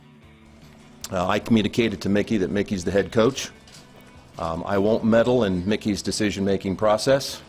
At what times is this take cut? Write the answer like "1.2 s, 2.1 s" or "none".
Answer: 1.1 s